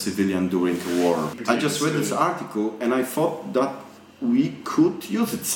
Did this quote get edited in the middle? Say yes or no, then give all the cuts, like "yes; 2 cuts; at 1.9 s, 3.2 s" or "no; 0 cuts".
yes; 1 cut; at 1.3 s